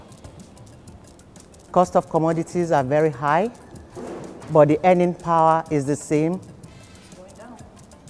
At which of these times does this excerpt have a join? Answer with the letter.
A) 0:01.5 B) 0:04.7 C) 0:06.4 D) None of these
D